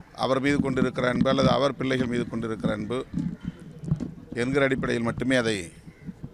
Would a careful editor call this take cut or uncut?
uncut